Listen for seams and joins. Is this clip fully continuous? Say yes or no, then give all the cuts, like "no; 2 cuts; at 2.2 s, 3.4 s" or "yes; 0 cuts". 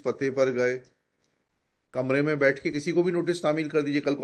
no; 1 cut; at 1.7 s